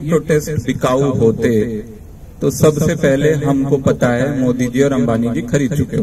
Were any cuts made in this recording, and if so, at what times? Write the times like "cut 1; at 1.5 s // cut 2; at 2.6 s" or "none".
none